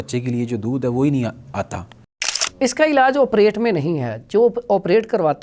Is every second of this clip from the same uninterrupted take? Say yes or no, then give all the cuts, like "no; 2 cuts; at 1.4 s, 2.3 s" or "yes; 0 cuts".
no; 1 cut; at 2.1 s